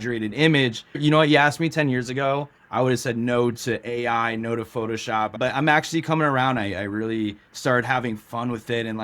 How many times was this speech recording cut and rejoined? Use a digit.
2